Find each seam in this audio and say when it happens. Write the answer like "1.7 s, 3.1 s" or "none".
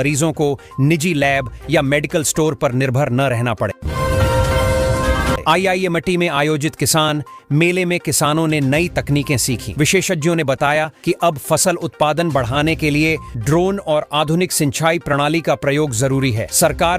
3.8 s, 5.4 s